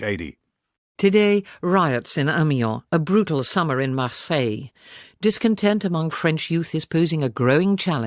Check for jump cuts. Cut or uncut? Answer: uncut